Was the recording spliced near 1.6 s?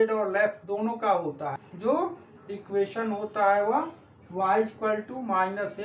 yes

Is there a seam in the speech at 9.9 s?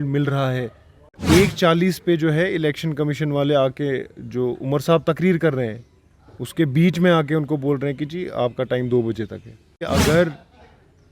yes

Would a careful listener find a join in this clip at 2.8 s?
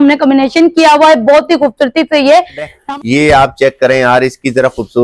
yes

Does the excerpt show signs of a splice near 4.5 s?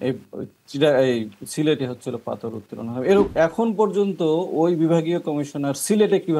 no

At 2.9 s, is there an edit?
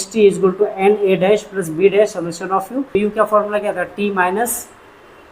yes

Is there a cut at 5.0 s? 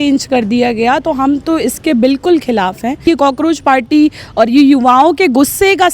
no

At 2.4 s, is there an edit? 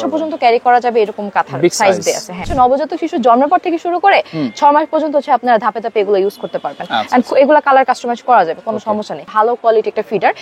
yes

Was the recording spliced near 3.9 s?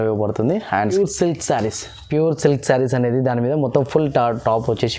no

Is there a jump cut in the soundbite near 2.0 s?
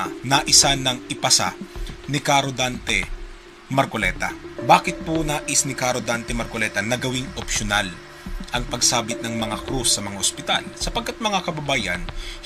no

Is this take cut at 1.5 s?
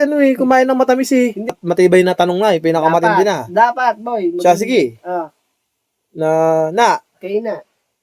yes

